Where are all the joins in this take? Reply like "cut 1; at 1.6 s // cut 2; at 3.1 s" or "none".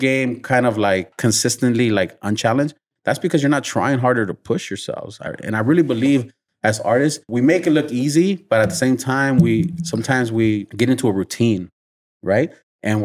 cut 1; at 1.1 s // cut 2; at 7.3 s // cut 3; at 10.7 s